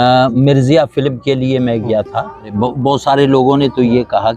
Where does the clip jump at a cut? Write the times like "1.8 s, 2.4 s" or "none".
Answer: 2.5 s